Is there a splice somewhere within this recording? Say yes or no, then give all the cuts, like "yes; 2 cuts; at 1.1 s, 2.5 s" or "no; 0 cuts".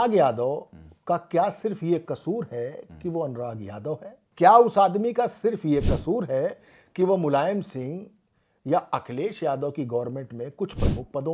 yes; 1 cut; at 4.2 s